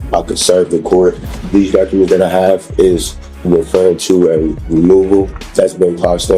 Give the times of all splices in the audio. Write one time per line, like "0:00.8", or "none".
0:01.3
0:05.4